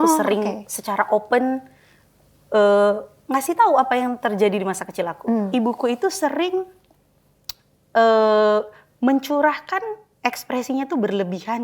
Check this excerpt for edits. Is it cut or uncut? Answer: cut